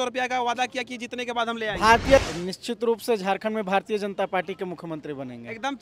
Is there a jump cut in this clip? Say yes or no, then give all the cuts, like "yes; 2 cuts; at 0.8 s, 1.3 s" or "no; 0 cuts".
yes; 1 cut; at 2.2 s